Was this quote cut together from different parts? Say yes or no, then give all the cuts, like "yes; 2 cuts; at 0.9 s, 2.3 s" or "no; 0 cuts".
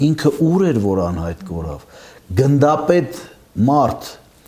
no; 0 cuts